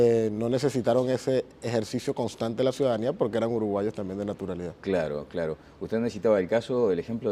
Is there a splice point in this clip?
yes; 1 cut; at 3.5 s

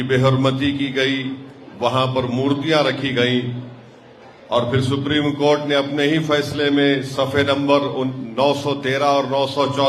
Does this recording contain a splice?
no; 0 cuts

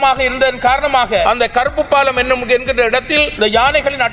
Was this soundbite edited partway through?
yes; 2 cuts; at 1.2 s, 3.3 s

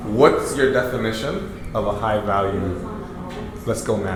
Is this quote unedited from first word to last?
yes; 0 cuts

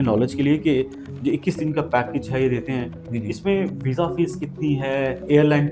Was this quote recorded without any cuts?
yes; 0 cuts

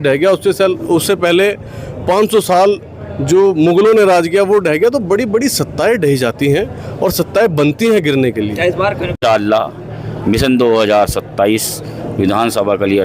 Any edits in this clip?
yes; 1 cut; at 9.2 s

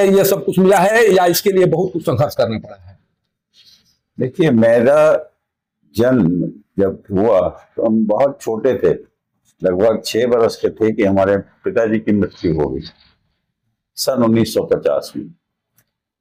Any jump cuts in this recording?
no; 0 cuts

